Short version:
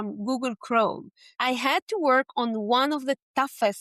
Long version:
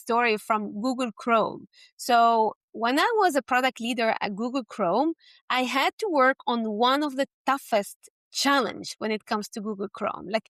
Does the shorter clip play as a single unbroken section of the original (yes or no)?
no